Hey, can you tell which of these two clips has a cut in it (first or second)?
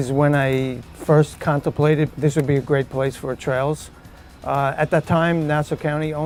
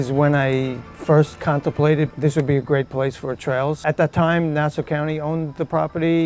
second